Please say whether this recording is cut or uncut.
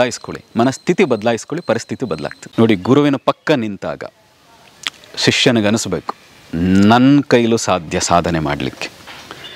cut